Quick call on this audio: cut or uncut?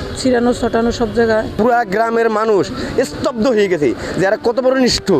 cut